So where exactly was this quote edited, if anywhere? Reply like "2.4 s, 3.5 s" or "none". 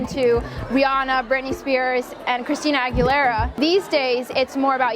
3.6 s